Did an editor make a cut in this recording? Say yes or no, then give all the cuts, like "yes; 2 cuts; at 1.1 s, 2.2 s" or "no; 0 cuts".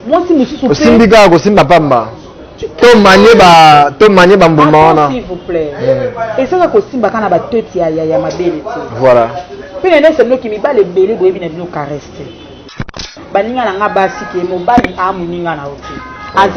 yes; 1 cut; at 12.8 s